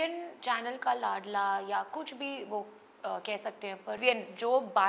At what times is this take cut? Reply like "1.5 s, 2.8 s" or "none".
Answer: 4.0 s